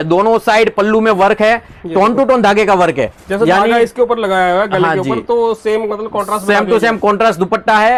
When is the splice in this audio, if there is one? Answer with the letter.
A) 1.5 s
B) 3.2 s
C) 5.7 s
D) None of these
D